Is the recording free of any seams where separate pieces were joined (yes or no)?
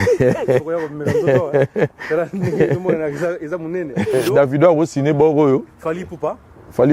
no